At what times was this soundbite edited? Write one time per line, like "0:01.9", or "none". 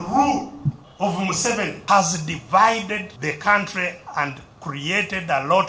0:00.9
0:01.8
0:03.1